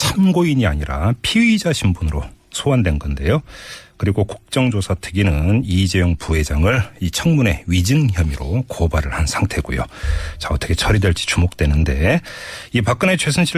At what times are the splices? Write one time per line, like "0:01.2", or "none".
0:03.1